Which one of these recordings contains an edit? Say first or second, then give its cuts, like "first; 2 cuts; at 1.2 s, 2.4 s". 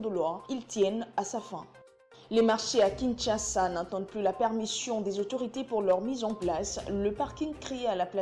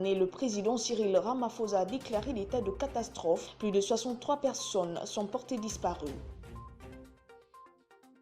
second; 1 cut; at 6.2 s